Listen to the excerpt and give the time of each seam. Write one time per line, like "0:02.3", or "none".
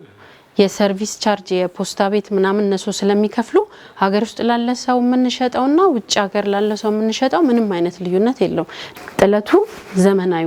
0:08.8